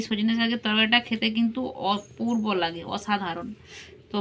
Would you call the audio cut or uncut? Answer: uncut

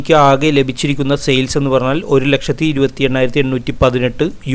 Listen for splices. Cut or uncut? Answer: uncut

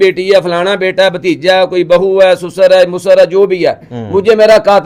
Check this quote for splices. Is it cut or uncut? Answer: uncut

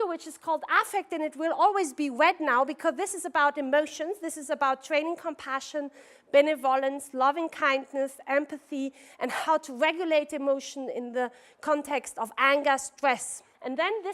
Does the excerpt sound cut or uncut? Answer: cut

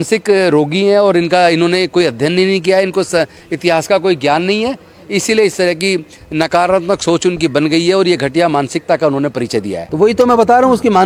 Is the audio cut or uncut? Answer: uncut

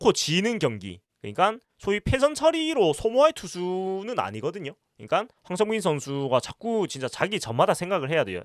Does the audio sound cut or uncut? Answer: cut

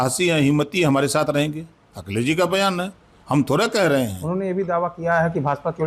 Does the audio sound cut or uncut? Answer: uncut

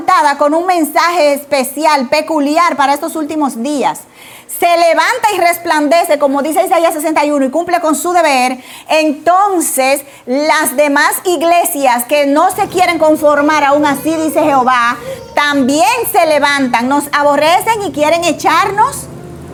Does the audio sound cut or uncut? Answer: uncut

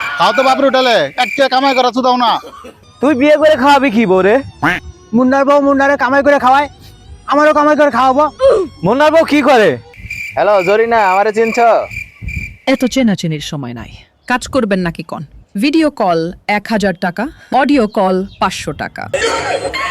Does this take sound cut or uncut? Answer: cut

